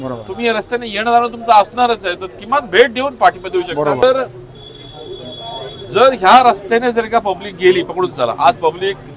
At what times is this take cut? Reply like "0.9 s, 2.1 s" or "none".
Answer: 4.0 s